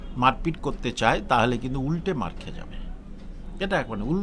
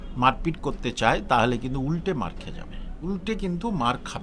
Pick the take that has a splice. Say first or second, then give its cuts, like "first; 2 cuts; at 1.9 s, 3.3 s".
second; 1 cut; at 3.1 s